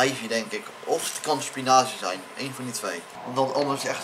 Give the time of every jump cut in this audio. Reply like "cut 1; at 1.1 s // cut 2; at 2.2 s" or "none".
cut 1; at 3.1 s